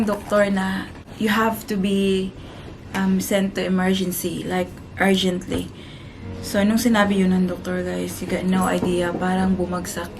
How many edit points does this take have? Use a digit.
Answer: 1